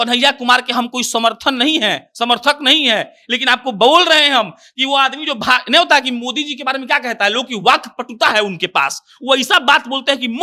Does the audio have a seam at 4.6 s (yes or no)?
no